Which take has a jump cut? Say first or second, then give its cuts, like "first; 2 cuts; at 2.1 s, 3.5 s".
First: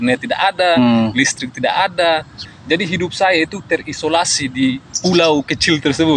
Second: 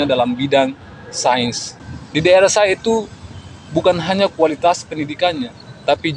first; 2 cuts; at 2.4 s, 4.9 s